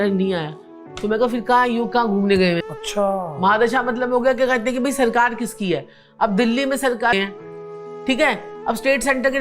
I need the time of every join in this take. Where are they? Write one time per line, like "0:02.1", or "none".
0:02.6
0:07.1